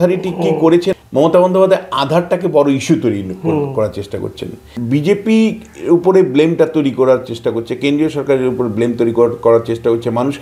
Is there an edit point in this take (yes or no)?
yes